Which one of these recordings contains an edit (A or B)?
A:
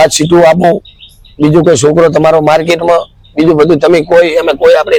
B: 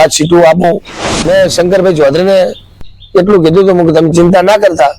B